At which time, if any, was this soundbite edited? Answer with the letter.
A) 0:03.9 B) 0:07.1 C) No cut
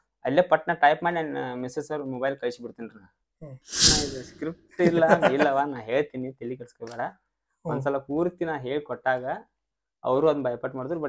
A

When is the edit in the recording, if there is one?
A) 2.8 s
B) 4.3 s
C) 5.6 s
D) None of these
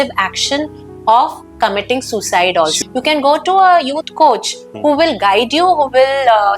A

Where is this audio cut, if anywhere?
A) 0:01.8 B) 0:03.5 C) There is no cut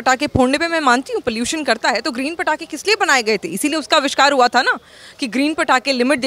C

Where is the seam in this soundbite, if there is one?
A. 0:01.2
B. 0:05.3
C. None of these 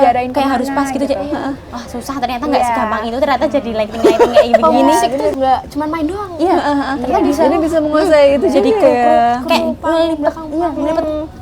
B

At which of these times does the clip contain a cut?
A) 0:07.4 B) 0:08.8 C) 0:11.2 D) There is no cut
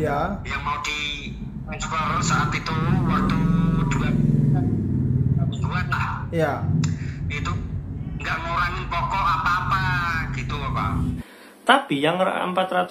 C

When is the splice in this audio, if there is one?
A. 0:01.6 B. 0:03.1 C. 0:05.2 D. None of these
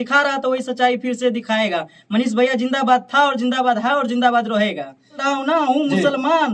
C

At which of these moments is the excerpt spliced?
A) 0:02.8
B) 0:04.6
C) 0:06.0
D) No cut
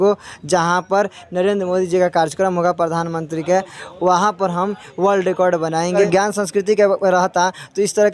C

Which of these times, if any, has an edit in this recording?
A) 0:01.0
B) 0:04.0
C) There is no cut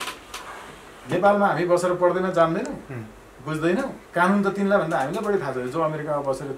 B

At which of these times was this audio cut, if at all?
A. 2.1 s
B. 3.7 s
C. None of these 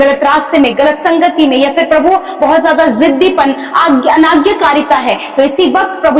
C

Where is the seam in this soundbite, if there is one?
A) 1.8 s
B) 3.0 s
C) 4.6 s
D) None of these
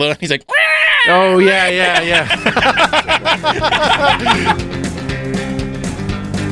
C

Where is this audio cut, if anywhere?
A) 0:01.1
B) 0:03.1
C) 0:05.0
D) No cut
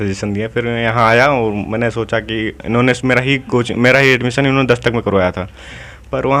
D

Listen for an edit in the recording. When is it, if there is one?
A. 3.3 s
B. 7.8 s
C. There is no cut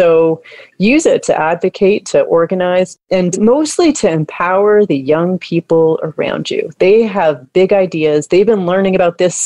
A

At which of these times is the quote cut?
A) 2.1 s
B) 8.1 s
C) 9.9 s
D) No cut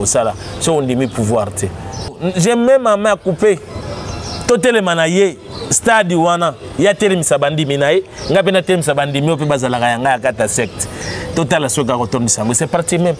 A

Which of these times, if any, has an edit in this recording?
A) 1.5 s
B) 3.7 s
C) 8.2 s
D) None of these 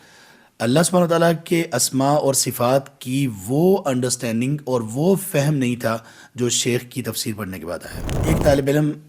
C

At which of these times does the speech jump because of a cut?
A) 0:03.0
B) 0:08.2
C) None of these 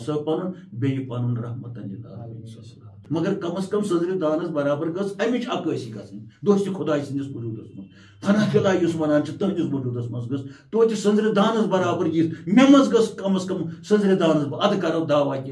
A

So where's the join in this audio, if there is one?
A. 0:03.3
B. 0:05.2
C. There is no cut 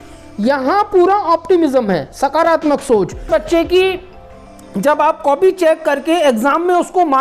A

